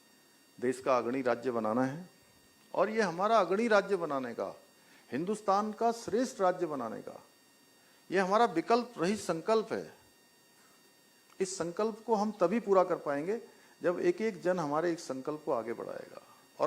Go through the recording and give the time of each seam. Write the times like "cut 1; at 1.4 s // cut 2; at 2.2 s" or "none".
cut 1; at 10.9 s